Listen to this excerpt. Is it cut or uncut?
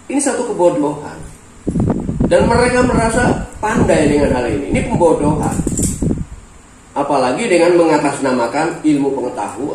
uncut